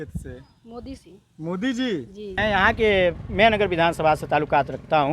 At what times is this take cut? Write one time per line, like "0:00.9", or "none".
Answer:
0:02.2